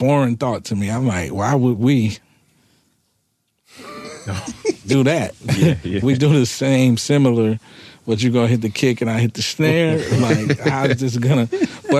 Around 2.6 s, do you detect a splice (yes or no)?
no